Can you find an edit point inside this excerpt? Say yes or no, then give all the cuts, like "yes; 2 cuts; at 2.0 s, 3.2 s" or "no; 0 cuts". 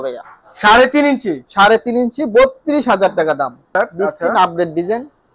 yes; 1 cut; at 3.6 s